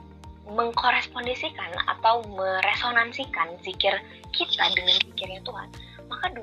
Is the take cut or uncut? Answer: uncut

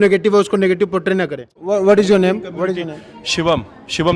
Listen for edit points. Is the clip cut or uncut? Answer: cut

